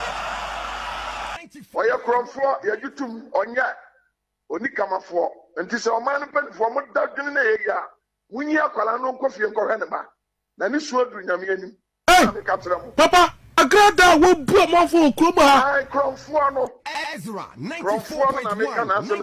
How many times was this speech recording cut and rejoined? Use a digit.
2